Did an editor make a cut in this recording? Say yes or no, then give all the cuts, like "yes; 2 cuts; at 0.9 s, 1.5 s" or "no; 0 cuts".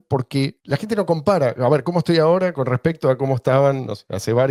no; 0 cuts